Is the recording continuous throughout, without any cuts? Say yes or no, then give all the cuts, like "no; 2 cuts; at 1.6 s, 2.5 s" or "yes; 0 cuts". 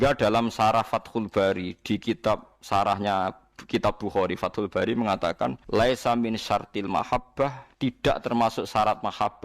no; 2 cuts; at 5.6 s, 7.6 s